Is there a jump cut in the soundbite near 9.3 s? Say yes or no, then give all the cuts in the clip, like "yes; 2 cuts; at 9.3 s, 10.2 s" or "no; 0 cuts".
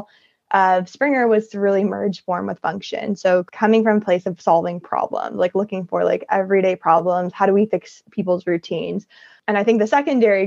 yes; 2 cuts; at 3.5 s, 9.3 s